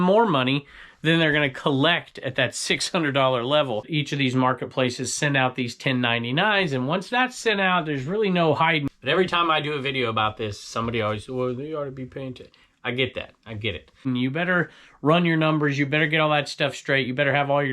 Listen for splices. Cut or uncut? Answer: cut